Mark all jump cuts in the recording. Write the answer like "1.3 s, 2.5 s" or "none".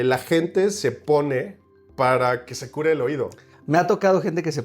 3.5 s